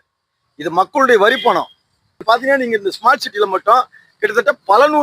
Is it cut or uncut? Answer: cut